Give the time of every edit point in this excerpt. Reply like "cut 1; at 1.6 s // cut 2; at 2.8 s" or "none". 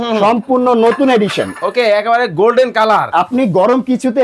cut 1; at 3.1 s